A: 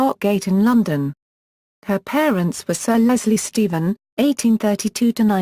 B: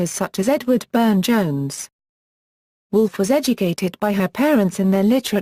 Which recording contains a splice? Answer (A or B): A